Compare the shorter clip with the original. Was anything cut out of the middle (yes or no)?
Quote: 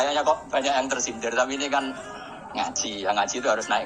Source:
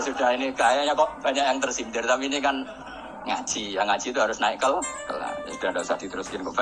no